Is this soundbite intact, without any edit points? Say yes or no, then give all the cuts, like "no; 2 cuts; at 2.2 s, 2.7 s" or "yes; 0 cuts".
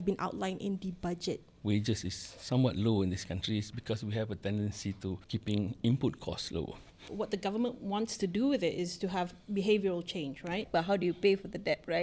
no; 4 cuts; at 1.5 s, 5.2 s, 7.0 s, 10.7 s